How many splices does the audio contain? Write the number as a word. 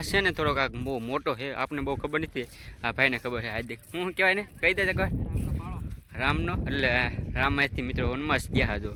zero